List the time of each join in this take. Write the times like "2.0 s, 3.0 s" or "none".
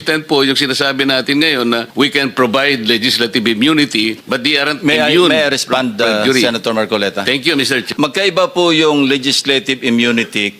1.9 s, 4.2 s, 7.9 s